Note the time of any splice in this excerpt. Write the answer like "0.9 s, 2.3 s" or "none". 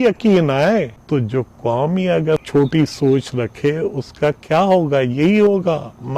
1.0 s, 2.3 s